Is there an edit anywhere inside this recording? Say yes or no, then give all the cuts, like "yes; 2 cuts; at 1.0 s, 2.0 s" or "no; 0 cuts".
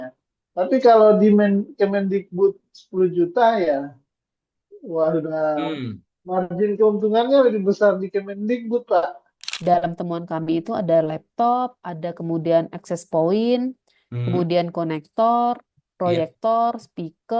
yes; 1 cut; at 9.3 s